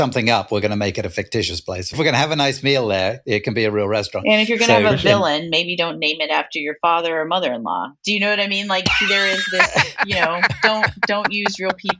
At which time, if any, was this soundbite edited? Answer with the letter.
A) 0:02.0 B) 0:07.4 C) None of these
A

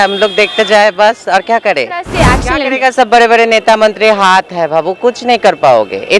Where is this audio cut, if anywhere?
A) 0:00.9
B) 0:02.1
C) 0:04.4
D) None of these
B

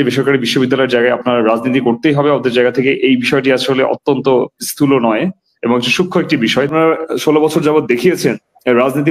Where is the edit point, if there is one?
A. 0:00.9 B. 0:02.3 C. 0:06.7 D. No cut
C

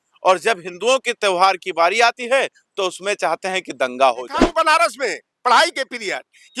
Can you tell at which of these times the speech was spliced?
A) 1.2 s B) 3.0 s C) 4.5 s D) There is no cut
C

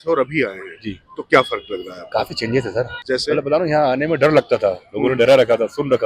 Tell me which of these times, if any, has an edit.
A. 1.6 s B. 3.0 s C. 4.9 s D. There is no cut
B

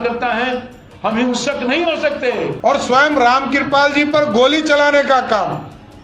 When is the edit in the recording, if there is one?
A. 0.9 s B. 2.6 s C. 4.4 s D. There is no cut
B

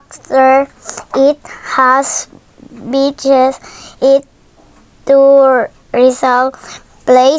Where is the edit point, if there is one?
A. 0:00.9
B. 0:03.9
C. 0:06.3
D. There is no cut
A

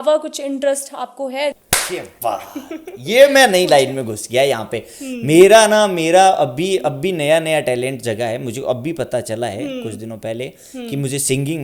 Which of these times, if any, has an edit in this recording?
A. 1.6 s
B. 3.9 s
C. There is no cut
A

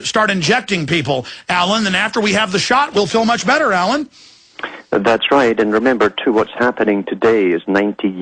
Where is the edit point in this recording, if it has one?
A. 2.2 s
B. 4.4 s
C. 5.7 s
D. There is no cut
D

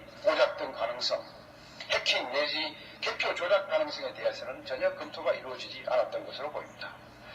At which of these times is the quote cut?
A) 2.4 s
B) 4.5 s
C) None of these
A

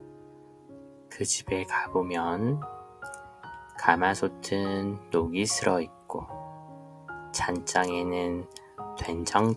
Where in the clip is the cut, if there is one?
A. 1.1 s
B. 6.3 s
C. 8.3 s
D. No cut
A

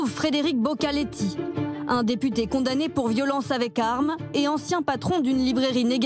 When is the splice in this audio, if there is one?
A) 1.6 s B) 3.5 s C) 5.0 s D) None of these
D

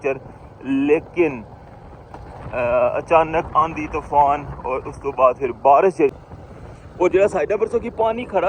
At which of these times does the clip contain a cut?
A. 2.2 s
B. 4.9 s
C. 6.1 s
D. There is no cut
C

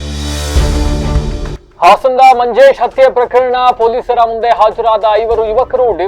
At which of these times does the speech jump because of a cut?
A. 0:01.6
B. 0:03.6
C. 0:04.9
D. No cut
A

